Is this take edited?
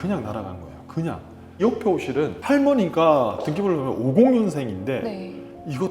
yes; 1 cut; at 1.6 s

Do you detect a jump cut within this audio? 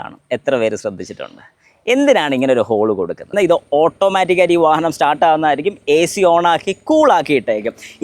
yes; 1 cut; at 3.3 s

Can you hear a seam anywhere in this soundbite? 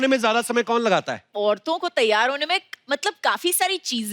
yes; 1 cut; at 1.2 s

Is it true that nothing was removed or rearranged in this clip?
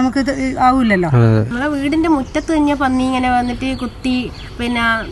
no; 1 cut; at 1.5 s

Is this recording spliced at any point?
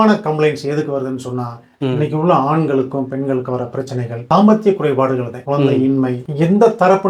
yes; 1 cut; at 6.2 s

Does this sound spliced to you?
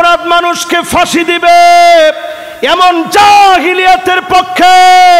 no; 0 cuts

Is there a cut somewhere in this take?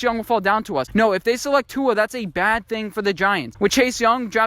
yes; 2 cuts; at 0.9 s, 3.5 s

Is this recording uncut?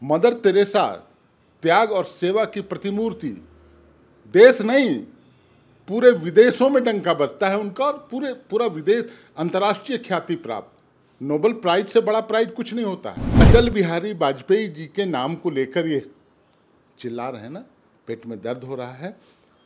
no; 1 cut; at 13.4 s

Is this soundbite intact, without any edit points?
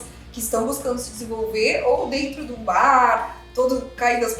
yes; 0 cuts

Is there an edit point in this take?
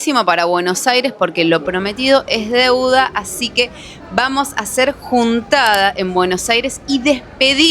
no; 0 cuts

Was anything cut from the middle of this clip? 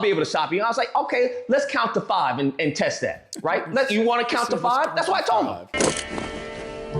no; 0 cuts

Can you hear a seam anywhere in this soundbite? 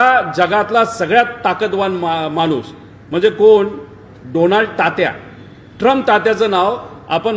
no; 0 cuts

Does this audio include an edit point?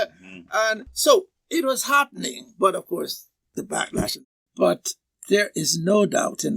yes; 1 cut; at 4.2 s

